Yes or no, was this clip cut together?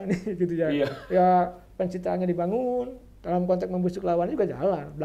no